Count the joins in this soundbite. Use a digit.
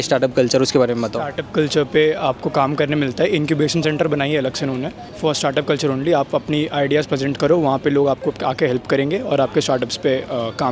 0